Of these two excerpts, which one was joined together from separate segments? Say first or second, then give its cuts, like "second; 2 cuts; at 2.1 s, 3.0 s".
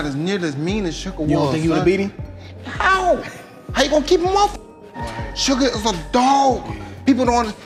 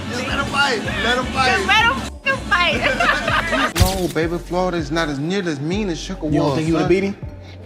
second; 1 cut; at 3.8 s